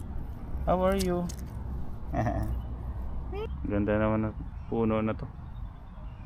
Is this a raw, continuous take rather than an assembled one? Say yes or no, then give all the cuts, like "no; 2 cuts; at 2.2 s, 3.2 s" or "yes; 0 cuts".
no; 1 cut; at 3.5 s